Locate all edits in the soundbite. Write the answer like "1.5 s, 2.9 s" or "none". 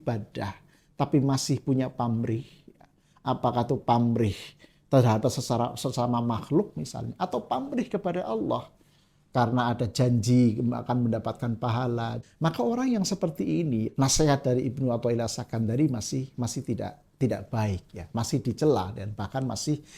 12.2 s, 13.9 s